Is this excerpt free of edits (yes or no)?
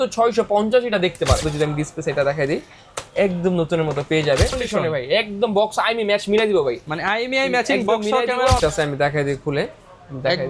no